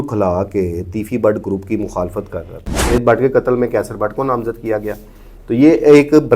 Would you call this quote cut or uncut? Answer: cut